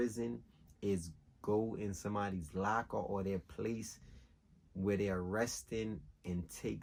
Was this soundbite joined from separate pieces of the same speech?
no; 0 cuts

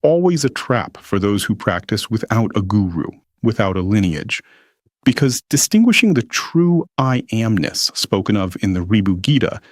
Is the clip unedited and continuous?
yes; 0 cuts

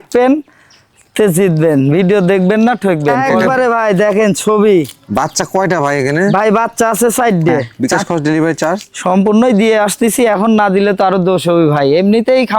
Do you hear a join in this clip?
yes; 2 cuts; at 3.3 s, 7.7 s

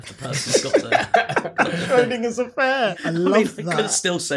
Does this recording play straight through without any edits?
no; 1 cut; at 2.9 s

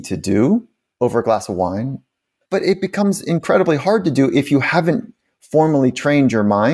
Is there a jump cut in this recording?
yes; 1 cut; at 2.3 s

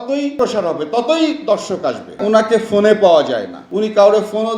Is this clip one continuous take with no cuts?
no; 1 cut; at 2.1 s

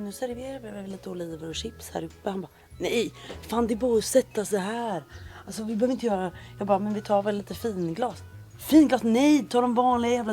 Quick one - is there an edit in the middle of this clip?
no; 0 cuts

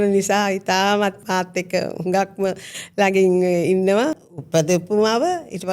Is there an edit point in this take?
yes; 2 cuts; at 1.2 s, 4.2 s

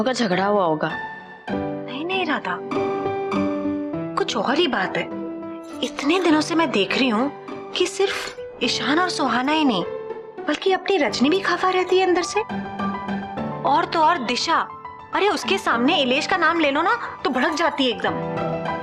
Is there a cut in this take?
no; 0 cuts

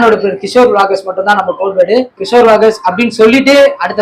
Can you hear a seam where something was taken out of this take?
yes; 1 cut; at 2.1 s

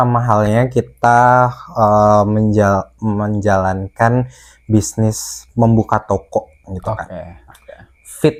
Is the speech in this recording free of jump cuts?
yes; 0 cuts

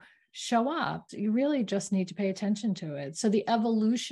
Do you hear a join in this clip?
yes; 1 cut; at 1.1 s

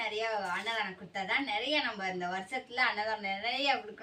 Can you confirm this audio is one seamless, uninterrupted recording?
yes; 0 cuts

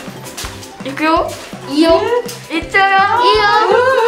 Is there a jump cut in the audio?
no; 0 cuts

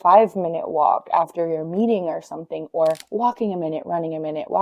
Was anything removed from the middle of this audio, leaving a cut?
yes; 1 cut; at 3.0 s

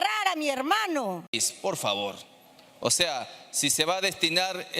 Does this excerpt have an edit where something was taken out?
yes; 1 cut; at 1.5 s

